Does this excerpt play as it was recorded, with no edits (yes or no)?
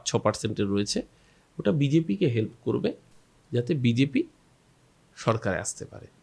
yes